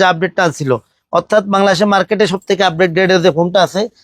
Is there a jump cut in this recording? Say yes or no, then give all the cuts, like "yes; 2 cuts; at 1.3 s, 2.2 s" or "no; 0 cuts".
no; 0 cuts